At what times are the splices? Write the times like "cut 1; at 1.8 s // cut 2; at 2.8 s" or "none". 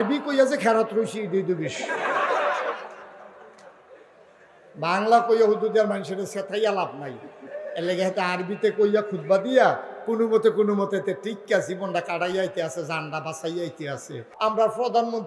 cut 1; at 14.3 s

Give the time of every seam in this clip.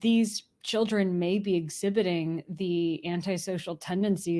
none

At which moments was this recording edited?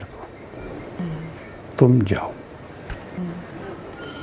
cut 1; at 3.2 s

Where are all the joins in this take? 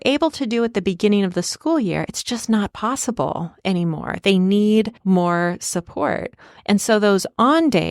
cut 1; at 5.0 s

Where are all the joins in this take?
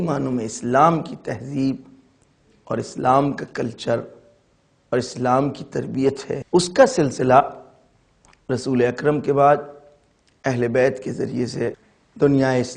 cut 1; at 6.3 s // cut 2; at 11.8 s

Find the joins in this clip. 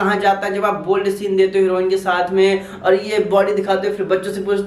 none

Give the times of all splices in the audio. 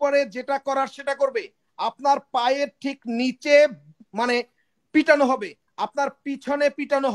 none

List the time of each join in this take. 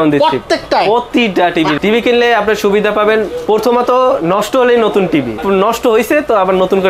cut 1; at 1.8 s // cut 2; at 5.4 s

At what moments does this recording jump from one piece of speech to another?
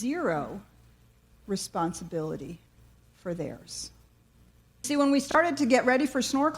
cut 1; at 4.8 s

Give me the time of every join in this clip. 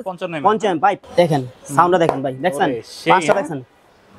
cut 1; at 1.0 s

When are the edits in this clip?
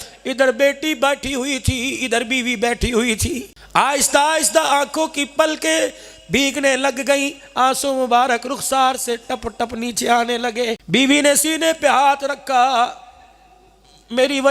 cut 1; at 3.5 s // cut 2; at 10.8 s

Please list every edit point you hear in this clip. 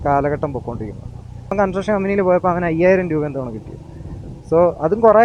cut 1; at 1.5 s

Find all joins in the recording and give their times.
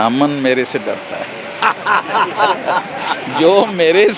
none

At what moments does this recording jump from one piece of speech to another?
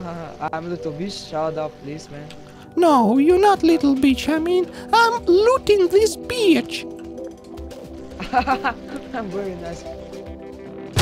cut 1; at 6.6 s // cut 2; at 8.2 s

